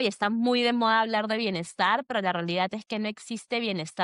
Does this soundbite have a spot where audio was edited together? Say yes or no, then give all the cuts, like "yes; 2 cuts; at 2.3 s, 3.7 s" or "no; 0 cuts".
no; 0 cuts